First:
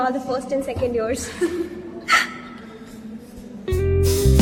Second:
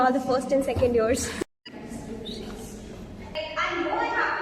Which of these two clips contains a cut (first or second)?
second